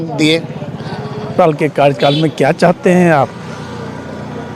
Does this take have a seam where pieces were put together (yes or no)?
yes